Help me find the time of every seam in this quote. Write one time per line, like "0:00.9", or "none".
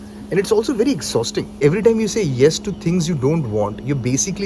0:01.5